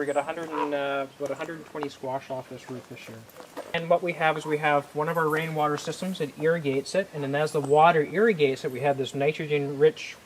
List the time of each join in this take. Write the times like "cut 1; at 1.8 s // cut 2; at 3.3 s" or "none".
cut 1; at 3.7 s